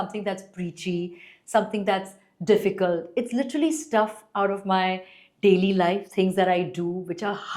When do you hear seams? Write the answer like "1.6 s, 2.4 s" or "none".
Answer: none